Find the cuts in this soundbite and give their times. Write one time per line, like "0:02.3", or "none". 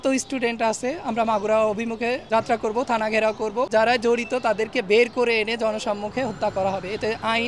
0:02.2
0:03.7